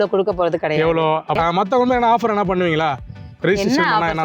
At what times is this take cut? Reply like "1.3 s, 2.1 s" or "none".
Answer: 1.4 s